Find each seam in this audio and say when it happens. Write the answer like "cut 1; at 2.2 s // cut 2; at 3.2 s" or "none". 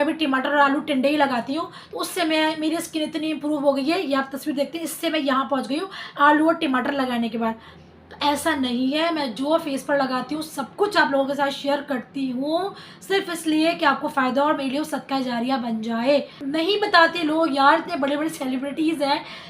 cut 1; at 16.4 s

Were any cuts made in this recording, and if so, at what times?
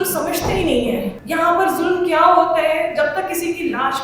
cut 1; at 1.2 s

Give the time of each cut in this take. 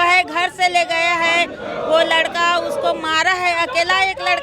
none

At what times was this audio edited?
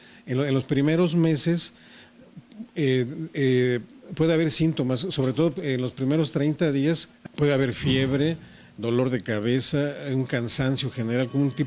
cut 1; at 7.1 s

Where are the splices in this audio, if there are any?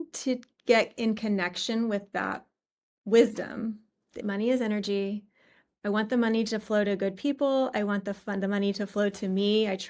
cut 1; at 4.2 s

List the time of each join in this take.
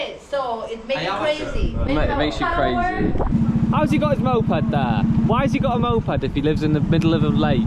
cut 1; at 3.3 s // cut 2; at 5.0 s

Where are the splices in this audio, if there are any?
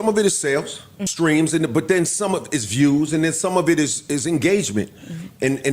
cut 1; at 1.0 s

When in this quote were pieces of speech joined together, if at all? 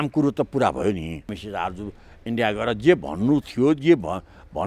cut 1; at 1.4 s

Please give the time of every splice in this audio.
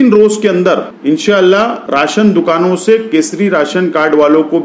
cut 1; at 0.9 s // cut 2; at 1.8 s

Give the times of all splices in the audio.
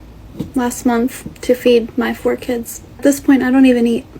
cut 1; at 3.0 s

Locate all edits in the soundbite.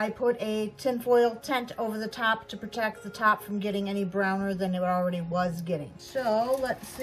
cut 1; at 6.0 s

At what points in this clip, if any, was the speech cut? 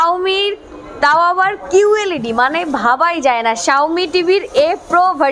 none

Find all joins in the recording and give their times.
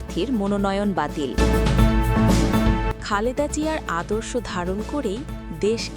cut 1; at 1.3 s // cut 2; at 3.0 s

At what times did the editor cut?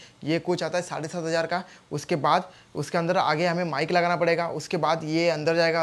none

